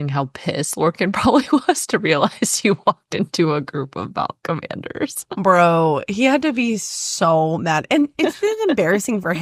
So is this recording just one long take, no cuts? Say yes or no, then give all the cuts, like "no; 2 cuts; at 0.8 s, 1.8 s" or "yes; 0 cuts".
yes; 0 cuts